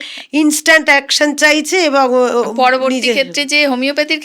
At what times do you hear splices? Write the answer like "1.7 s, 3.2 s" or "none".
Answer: none